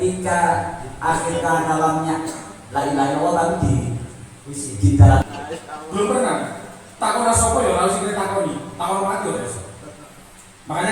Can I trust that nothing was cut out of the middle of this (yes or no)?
no